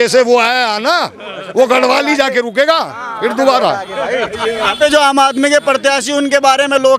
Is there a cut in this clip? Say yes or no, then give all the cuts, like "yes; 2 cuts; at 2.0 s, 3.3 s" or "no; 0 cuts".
no; 0 cuts